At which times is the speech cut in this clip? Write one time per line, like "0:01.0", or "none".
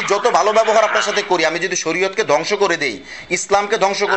none